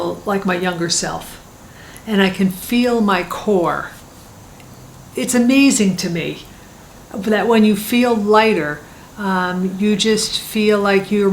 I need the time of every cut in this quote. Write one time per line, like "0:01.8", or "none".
none